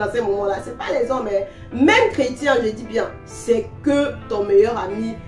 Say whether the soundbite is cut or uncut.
uncut